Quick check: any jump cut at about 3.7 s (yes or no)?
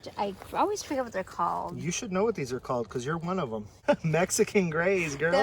yes